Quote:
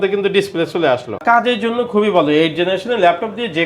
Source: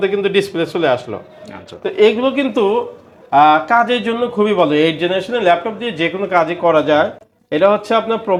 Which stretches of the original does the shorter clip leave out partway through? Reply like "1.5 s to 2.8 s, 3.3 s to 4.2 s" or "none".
1.2 s to 3.6 s